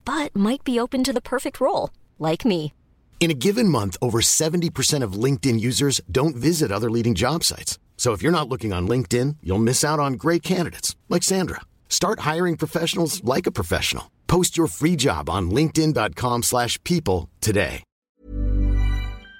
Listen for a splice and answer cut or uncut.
cut